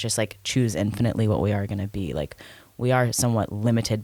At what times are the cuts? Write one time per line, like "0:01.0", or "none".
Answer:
none